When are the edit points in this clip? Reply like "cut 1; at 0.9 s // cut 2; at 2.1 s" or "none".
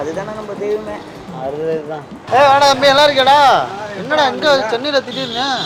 none